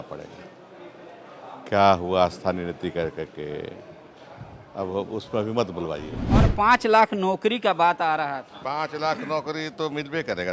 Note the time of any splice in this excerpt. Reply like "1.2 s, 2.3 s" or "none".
6.5 s